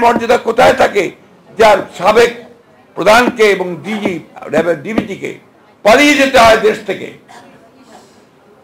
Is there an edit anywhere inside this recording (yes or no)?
no